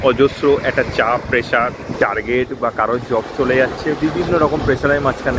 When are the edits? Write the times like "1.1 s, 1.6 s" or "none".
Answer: 1.9 s